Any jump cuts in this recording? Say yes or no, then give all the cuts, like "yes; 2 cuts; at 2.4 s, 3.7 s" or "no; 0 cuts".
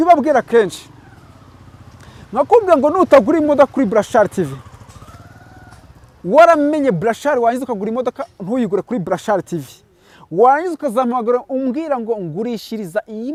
no; 0 cuts